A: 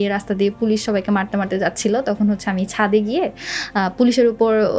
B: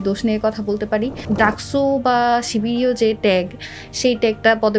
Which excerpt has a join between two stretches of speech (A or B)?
B